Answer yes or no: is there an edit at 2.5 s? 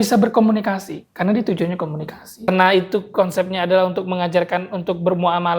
yes